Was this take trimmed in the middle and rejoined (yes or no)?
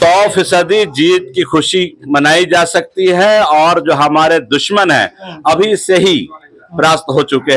no